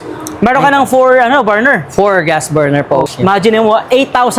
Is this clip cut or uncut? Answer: cut